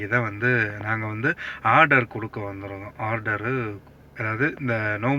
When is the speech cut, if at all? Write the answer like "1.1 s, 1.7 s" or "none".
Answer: none